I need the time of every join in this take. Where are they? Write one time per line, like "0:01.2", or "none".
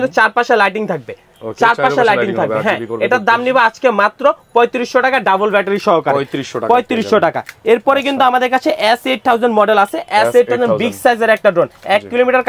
none